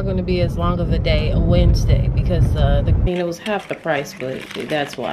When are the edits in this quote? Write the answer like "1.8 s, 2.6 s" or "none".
3.1 s